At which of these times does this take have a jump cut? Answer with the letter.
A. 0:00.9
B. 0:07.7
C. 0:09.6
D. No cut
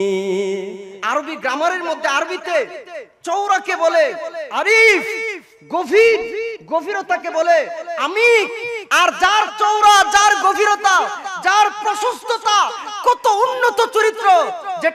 A